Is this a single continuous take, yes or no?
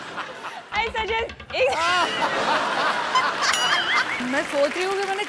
no